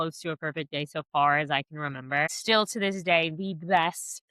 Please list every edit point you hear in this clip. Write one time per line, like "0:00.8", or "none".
0:02.3